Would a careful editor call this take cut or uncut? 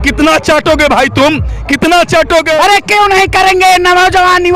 cut